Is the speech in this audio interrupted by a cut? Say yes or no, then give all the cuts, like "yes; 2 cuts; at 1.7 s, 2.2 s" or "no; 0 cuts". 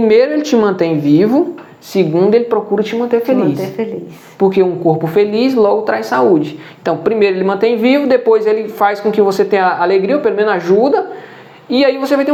no; 0 cuts